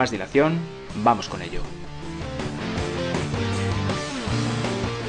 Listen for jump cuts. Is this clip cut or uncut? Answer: uncut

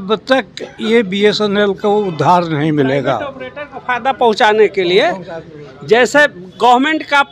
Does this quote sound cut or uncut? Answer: uncut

